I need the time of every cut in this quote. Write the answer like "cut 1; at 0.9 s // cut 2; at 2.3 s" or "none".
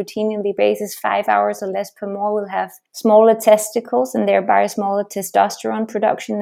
cut 1; at 2.8 s